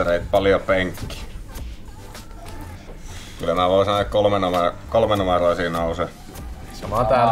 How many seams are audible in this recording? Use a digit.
1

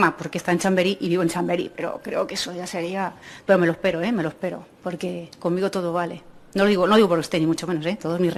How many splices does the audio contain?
0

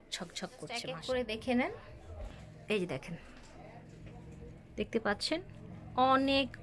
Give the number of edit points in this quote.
1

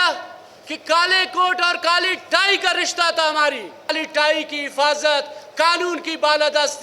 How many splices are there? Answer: 1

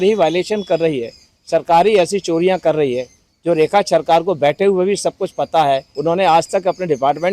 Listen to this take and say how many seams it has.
1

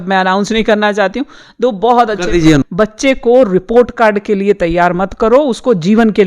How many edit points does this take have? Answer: 1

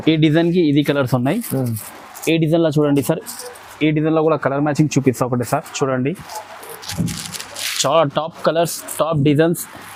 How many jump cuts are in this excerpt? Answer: 0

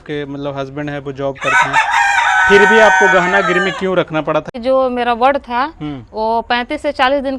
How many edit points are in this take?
1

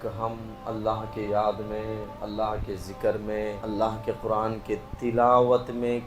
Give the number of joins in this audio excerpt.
2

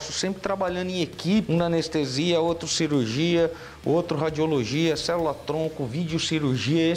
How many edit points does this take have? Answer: 1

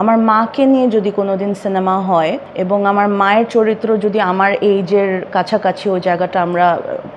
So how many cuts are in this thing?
0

